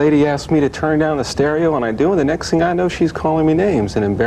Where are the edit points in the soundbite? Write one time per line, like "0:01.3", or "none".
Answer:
none